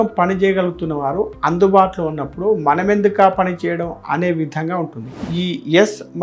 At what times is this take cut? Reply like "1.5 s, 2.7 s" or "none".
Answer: 5.2 s